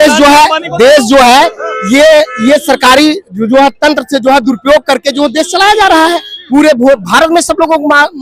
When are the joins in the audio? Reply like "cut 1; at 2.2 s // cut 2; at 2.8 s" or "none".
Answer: none